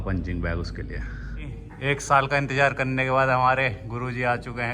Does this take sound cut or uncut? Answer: cut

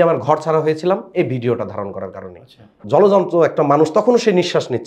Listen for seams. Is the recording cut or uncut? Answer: cut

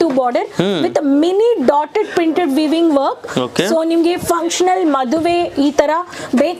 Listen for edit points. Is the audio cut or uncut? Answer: uncut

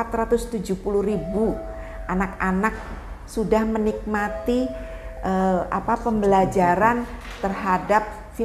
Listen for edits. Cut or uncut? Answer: uncut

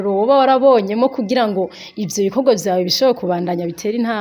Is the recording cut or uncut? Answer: uncut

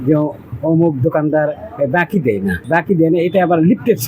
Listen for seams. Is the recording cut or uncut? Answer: cut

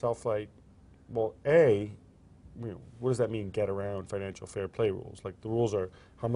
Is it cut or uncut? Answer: cut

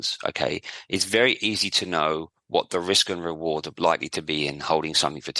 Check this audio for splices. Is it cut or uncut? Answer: uncut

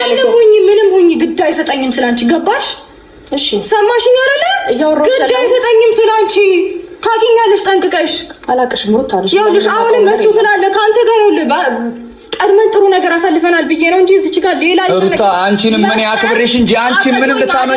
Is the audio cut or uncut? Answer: uncut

